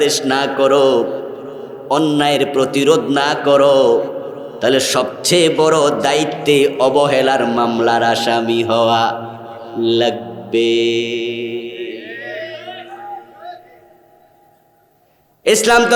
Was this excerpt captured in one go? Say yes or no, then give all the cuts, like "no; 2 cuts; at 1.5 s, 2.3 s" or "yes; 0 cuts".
yes; 0 cuts